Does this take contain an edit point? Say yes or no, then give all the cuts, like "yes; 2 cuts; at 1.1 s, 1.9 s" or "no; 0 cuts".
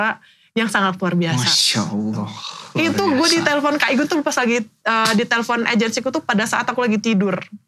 no; 0 cuts